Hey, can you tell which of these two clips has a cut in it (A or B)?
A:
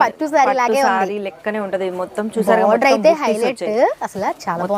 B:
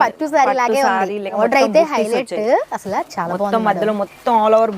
B